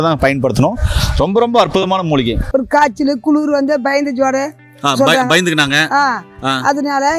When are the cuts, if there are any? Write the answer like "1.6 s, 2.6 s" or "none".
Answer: 2.4 s